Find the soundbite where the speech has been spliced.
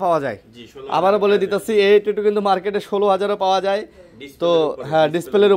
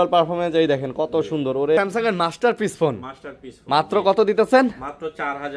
second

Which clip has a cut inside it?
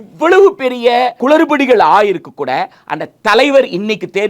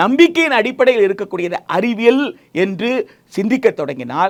first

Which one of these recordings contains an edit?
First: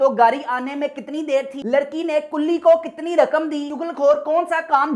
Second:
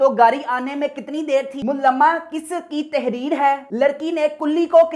first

